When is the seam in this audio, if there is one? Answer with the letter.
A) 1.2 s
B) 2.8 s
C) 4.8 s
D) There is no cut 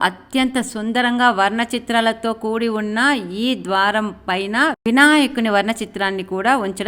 D